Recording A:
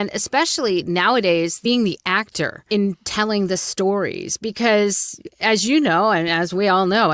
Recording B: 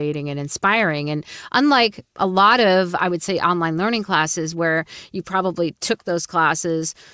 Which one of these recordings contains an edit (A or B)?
A